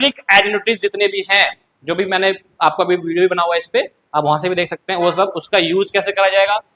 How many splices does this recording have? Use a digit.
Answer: 0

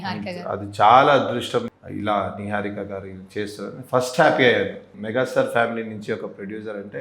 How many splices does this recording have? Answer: 2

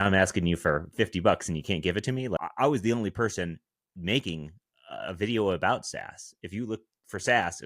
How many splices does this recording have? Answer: 1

